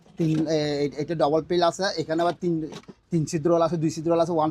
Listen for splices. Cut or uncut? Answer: uncut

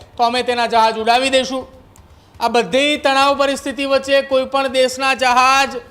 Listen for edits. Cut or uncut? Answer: uncut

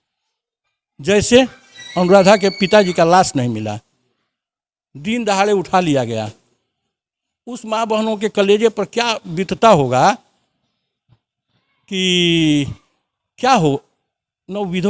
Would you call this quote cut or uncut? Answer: uncut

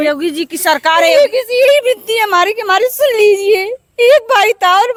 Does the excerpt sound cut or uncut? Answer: uncut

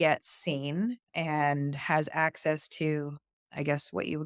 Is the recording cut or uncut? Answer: cut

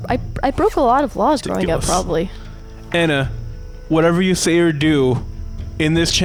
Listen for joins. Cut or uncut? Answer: uncut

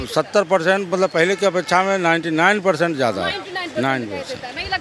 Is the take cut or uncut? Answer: uncut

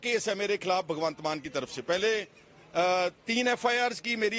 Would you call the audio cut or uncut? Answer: uncut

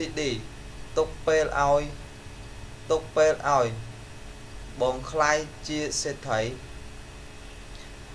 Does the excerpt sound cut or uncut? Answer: cut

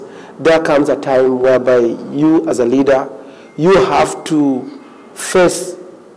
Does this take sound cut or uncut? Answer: uncut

